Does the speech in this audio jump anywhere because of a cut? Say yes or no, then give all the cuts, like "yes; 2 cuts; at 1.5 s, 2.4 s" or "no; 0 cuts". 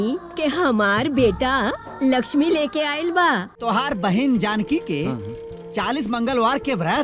yes; 1 cut; at 3.5 s